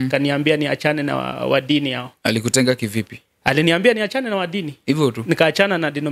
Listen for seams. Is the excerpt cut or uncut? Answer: uncut